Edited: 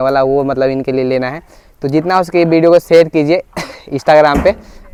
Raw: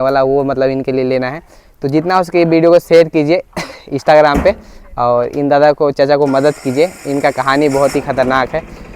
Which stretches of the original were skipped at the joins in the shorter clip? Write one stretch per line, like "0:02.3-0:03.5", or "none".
none